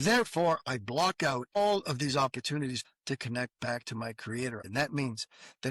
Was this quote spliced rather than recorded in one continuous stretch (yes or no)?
yes